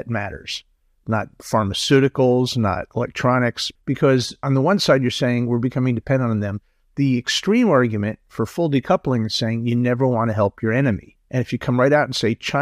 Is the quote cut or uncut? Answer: cut